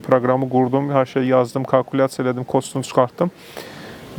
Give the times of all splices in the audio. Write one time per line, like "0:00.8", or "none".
none